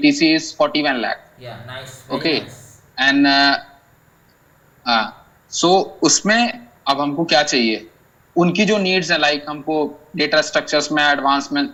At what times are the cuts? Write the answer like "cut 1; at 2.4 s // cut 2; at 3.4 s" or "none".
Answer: none